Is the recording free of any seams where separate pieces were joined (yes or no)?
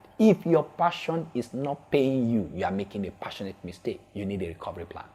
yes